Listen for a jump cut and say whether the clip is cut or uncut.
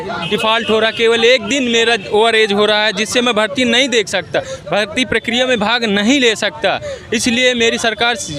uncut